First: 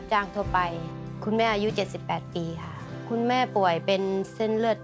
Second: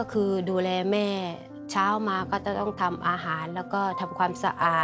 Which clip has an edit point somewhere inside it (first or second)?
first